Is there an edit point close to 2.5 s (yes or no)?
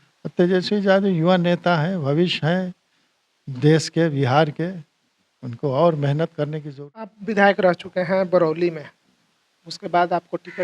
no